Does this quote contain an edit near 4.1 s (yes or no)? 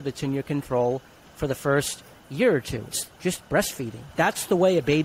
yes